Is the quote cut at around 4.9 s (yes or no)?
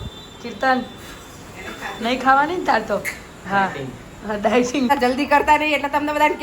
yes